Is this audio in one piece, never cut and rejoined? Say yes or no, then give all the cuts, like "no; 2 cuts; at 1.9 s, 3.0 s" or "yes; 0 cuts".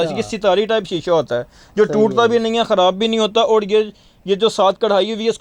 yes; 0 cuts